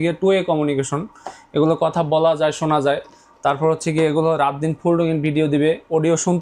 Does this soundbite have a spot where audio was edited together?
no; 0 cuts

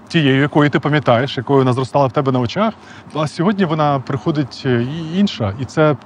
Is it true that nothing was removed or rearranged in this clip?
no; 1 cut; at 3.1 s

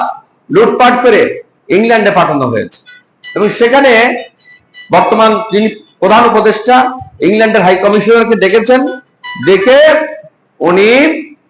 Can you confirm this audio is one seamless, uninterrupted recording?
yes; 0 cuts

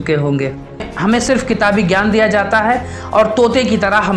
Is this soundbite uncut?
no; 1 cut; at 0.9 s

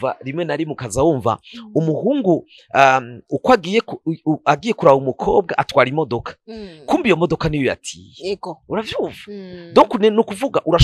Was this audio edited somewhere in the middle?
no; 0 cuts

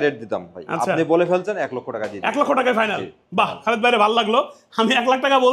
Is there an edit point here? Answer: no; 0 cuts

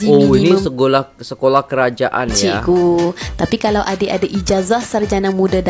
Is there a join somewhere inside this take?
no; 0 cuts

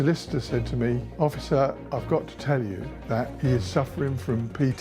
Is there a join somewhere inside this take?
yes; 3 cuts; at 1.1 s, 1.8 s, 3.3 s

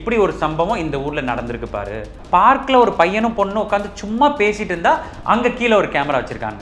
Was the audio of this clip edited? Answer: yes; 1 cut; at 2.1 s

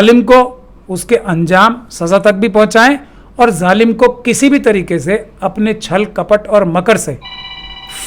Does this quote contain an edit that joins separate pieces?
no; 0 cuts

